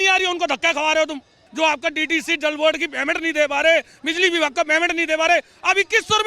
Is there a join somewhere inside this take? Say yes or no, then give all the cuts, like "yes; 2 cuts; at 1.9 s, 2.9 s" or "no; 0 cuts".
yes; 1 cut; at 1.4 s